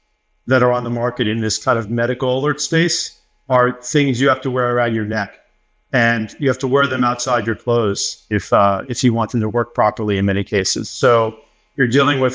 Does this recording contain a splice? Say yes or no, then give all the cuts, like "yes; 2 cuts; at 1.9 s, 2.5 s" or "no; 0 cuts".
no; 0 cuts